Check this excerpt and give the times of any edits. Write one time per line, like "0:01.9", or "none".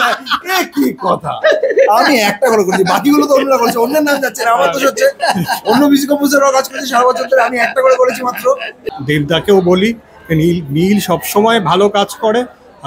0:08.9